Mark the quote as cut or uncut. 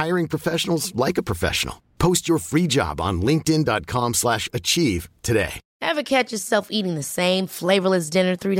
cut